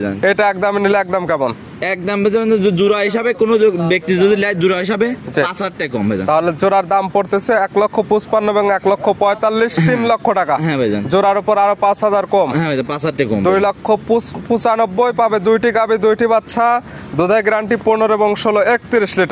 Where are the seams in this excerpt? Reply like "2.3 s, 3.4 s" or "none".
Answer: none